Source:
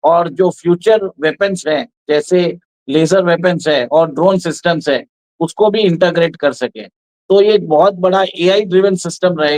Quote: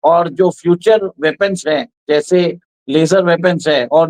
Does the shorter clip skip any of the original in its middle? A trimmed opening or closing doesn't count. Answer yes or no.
no